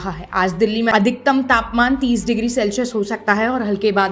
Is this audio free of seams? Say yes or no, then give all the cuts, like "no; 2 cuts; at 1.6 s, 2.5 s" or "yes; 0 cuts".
no; 1 cut; at 0.9 s